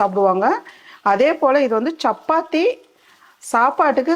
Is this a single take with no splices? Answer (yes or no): yes